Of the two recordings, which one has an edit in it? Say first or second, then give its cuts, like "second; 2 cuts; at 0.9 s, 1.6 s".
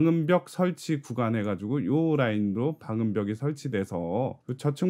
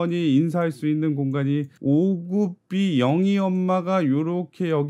second; 1 cut; at 1.7 s